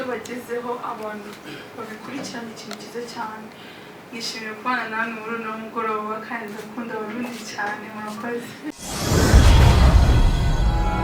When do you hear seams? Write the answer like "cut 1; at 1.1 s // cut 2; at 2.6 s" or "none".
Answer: cut 1; at 8.8 s